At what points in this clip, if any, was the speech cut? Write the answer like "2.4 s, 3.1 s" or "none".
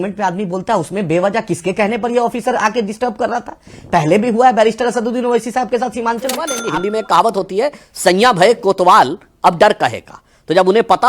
6.6 s